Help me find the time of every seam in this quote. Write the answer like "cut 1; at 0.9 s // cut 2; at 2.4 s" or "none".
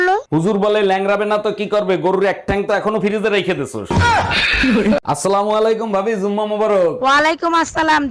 cut 1; at 5.0 s